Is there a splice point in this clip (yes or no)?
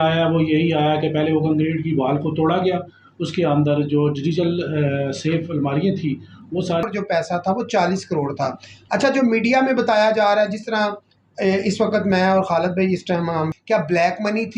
yes